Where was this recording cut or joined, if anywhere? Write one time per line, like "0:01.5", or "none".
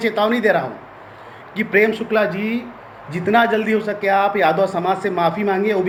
none